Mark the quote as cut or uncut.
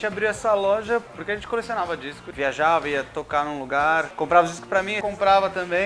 cut